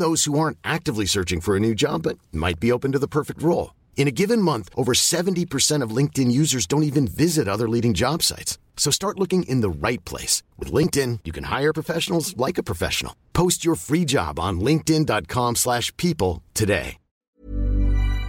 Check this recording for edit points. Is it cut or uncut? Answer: cut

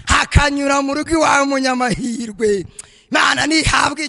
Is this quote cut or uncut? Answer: uncut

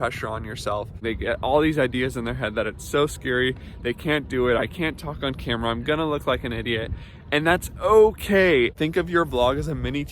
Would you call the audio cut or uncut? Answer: cut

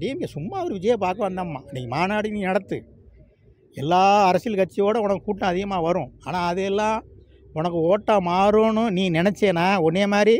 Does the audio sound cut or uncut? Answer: uncut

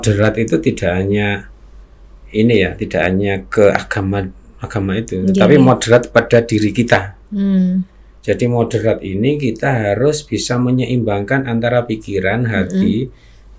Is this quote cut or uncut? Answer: uncut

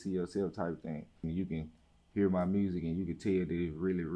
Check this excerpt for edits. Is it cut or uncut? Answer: cut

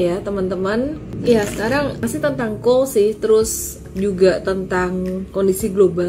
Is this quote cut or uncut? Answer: cut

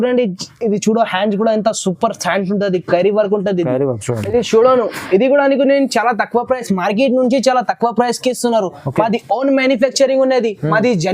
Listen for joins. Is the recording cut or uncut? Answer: cut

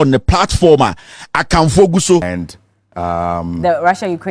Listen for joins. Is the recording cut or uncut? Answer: cut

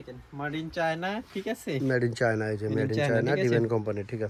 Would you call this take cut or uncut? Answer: uncut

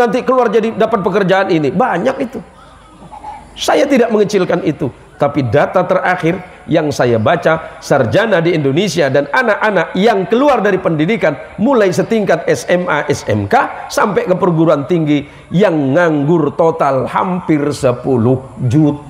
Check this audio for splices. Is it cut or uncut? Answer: uncut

